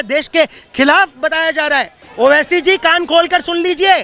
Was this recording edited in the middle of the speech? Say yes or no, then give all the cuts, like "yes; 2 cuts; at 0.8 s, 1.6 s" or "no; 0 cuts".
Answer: yes; 1 cut; at 2.0 s